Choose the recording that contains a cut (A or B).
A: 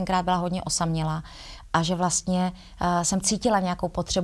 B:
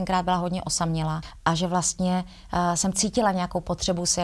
B